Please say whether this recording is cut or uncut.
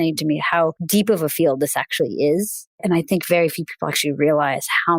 cut